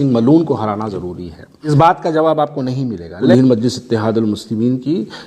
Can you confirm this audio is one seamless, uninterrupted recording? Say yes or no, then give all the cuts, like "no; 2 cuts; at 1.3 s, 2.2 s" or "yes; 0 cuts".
no; 2 cuts; at 1.7 s, 3.2 s